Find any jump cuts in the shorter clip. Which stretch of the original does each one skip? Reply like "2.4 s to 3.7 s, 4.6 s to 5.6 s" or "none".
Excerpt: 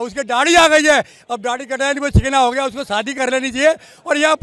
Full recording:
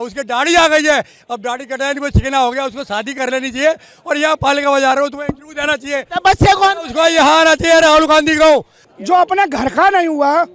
none

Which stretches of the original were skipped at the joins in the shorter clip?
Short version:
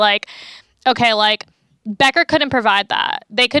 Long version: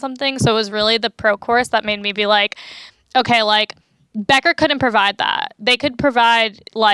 none

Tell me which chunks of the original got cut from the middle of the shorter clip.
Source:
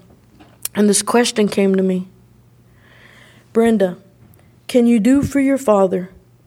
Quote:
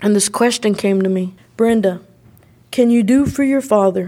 2.1 s to 3.4 s

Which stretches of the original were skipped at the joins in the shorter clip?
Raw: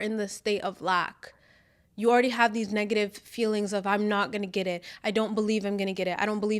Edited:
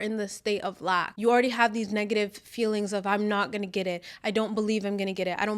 1.1 s to 1.9 s

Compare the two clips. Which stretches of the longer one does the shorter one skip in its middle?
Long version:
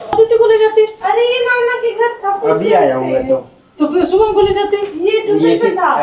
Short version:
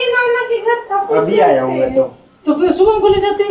none

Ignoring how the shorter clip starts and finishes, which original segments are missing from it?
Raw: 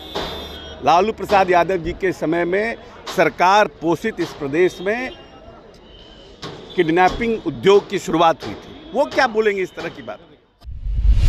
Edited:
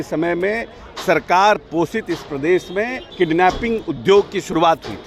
5.1 s to 6.6 s

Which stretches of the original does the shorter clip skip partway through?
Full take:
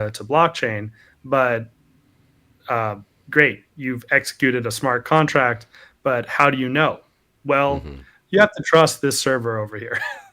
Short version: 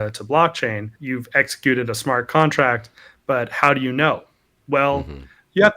0.9 s to 3.7 s

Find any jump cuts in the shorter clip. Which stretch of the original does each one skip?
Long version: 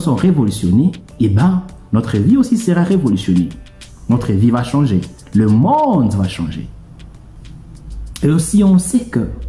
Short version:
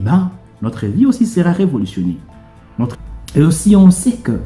4.2 s to 7.8 s

